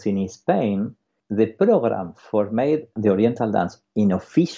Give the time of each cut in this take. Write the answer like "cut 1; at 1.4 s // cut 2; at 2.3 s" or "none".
cut 1; at 1.2 s // cut 2; at 3.0 s